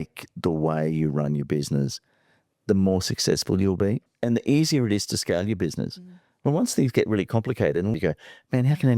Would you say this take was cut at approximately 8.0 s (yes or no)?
yes